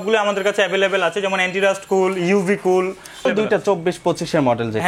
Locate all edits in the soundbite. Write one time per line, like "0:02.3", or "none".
0:03.2